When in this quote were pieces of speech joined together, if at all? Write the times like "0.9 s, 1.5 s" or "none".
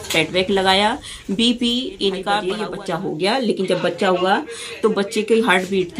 2.5 s